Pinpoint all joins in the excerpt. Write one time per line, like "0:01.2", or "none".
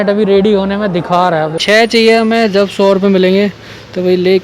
0:01.5

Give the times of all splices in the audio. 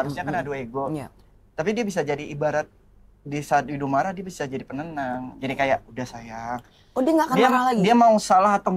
none

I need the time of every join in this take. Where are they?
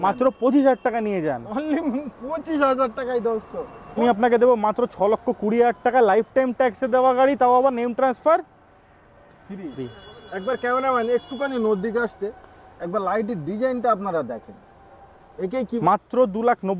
0:04.0
0:15.8

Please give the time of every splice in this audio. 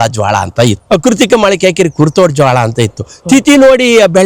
none

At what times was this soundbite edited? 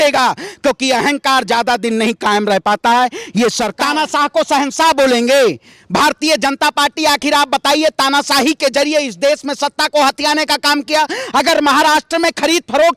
0:03.7

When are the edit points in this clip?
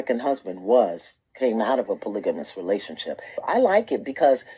0:01.5
0:03.2

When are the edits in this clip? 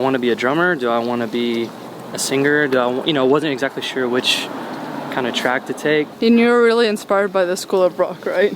0:06.1

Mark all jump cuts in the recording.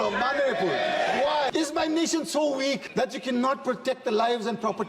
0:01.5
0:02.8

